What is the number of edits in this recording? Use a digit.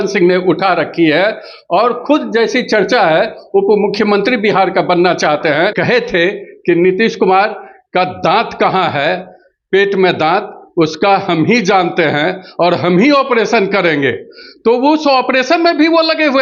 1